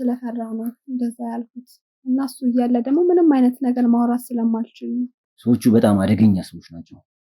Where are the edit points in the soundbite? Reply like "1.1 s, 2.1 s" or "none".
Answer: 5.2 s